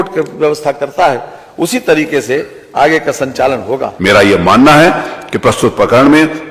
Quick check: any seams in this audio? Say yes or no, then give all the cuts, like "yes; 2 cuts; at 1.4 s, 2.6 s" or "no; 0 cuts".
yes; 1 cut; at 3.9 s